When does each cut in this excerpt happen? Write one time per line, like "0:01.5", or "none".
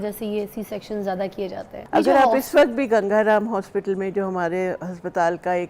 0:01.7